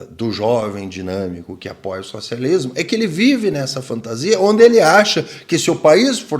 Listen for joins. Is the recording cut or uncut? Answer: uncut